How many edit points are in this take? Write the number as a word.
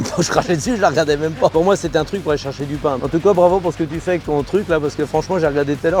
two